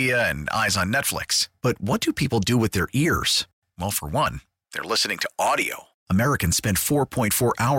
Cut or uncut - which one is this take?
uncut